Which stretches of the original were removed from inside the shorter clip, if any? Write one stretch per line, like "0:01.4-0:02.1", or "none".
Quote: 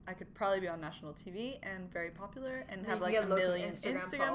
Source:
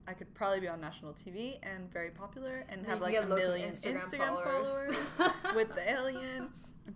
none